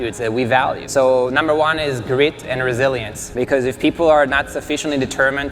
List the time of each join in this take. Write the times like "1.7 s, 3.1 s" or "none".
0.8 s, 3.2 s